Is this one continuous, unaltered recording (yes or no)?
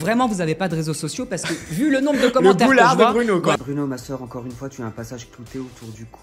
no